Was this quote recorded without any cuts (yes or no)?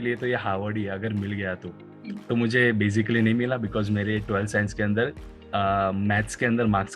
yes